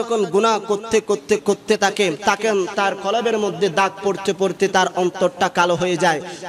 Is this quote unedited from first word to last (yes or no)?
no